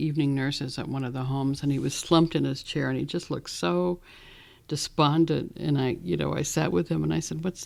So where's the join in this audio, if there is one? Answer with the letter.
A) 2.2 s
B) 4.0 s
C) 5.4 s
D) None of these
D